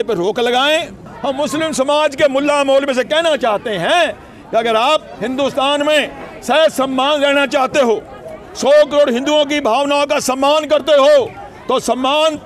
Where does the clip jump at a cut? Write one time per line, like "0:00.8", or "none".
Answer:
0:01.1